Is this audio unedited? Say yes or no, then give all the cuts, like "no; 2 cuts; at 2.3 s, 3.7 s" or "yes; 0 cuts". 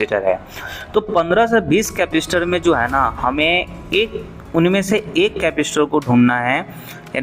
yes; 0 cuts